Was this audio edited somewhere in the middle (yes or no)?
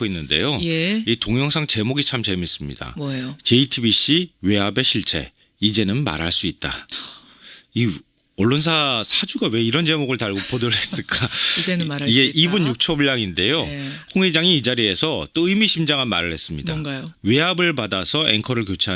yes